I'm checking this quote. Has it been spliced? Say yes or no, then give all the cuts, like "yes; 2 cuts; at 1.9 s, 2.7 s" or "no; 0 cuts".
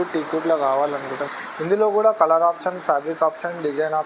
yes; 1 cut; at 1.3 s